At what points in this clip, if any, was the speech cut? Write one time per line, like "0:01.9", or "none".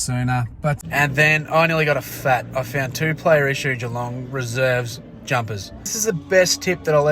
0:00.8
0:05.9